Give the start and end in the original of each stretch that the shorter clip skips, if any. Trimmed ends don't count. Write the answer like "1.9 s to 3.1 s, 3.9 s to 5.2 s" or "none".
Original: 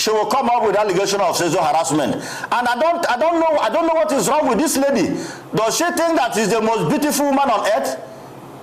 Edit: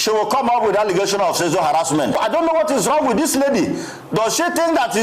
2.3 s to 3.7 s